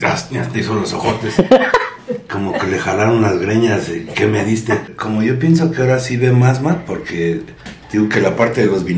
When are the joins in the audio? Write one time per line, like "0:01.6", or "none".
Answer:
0:04.9